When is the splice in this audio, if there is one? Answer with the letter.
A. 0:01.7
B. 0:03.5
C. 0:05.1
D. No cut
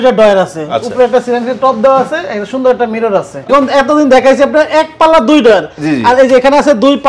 B